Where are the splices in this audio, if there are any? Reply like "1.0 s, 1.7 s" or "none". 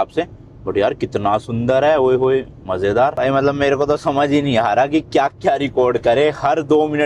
3.1 s